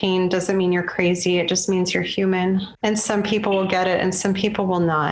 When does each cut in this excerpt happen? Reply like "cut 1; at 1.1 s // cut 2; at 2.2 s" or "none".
cut 1; at 2.7 s